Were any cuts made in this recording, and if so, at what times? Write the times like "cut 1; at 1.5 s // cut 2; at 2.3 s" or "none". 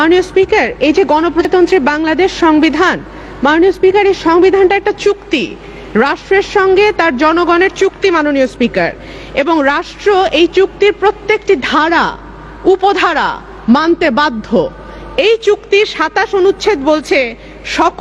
cut 1; at 1.4 s